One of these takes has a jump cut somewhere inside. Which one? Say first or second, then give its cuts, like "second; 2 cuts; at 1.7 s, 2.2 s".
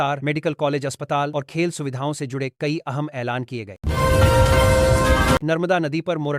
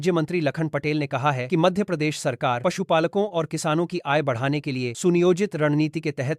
first; 2 cuts; at 3.7 s, 5.5 s